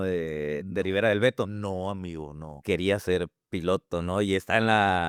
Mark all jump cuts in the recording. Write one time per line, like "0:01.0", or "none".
none